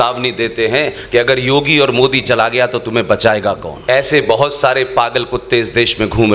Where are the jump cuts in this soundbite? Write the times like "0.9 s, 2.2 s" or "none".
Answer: 3.7 s